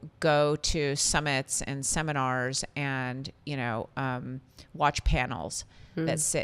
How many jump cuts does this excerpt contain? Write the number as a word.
zero